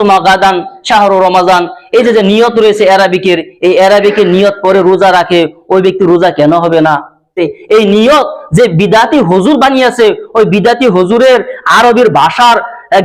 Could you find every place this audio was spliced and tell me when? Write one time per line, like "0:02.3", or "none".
0:07.4